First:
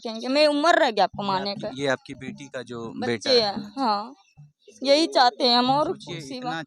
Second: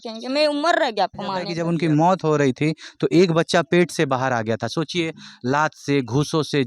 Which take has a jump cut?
second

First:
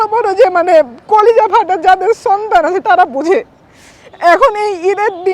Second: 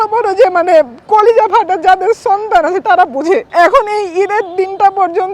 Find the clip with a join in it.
second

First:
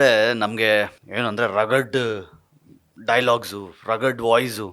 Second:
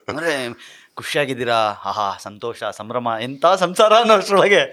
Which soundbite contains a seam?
first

